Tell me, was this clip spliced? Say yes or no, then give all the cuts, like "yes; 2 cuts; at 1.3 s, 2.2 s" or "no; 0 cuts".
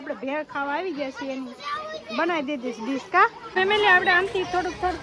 yes; 1 cut; at 3.4 s